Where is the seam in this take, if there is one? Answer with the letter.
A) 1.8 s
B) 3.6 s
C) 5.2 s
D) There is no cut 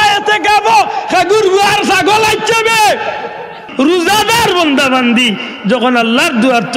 B